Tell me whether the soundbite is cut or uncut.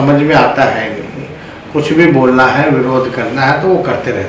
uncut